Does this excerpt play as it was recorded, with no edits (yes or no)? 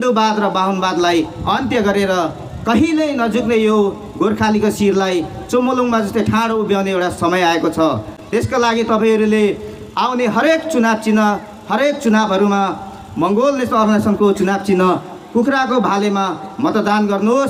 yes